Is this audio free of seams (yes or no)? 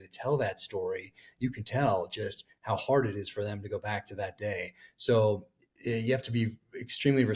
yes